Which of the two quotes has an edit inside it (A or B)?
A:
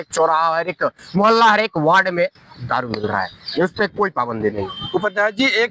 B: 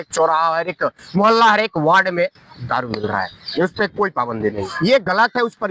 B